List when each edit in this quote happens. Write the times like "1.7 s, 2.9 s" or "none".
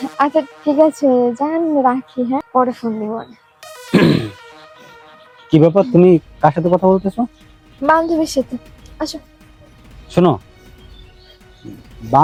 none